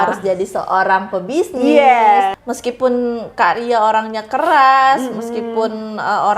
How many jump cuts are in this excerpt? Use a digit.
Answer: 1